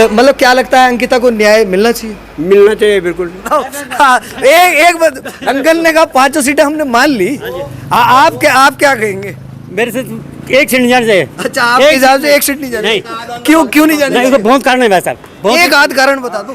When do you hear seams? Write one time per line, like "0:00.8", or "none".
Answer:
0:03.5